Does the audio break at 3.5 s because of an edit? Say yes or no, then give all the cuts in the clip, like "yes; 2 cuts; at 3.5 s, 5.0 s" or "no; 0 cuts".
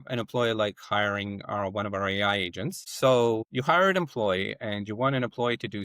yes; 1 cut; at 3.5 s